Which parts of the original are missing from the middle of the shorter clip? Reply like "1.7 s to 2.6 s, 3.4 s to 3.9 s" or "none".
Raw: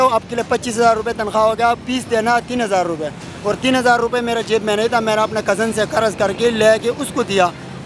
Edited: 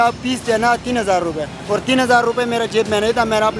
3.2 s to 3.3 s